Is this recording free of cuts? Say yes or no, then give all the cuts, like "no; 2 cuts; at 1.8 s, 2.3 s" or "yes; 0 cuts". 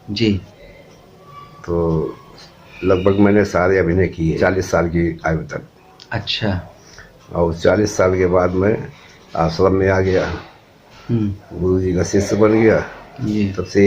no; 1 cut; at 4.4 s